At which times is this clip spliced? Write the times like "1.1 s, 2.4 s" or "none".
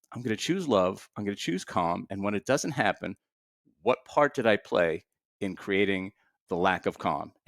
none